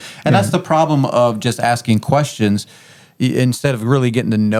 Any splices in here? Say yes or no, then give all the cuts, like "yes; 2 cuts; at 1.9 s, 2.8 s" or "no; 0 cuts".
no; 0 cuts